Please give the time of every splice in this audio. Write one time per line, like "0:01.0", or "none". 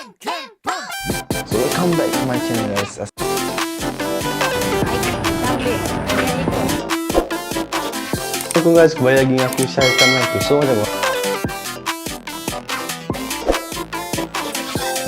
none